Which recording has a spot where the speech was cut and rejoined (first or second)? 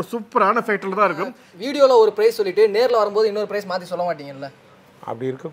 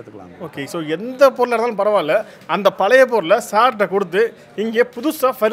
first